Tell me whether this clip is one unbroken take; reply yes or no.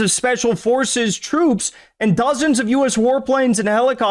yes